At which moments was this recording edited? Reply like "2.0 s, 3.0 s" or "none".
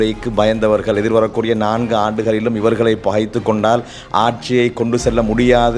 none